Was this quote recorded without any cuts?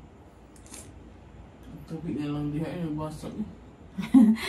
yes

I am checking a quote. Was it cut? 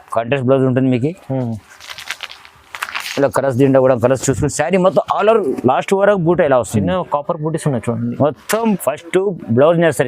yes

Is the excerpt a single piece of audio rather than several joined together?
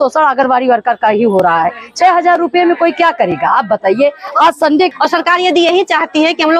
no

